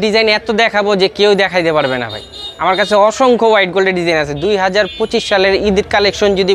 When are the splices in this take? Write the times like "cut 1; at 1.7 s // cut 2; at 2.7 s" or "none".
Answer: none